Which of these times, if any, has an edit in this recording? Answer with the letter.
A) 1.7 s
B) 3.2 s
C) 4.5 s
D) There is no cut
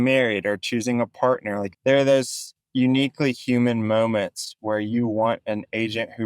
A